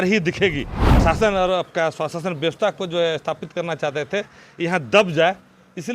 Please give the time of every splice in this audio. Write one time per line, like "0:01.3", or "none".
0:00.9